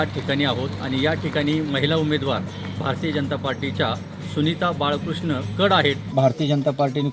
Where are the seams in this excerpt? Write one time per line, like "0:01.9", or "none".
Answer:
0:06.1